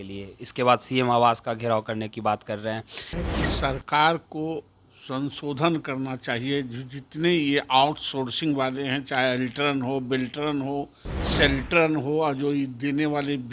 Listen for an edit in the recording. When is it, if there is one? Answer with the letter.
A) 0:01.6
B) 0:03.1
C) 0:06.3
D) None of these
B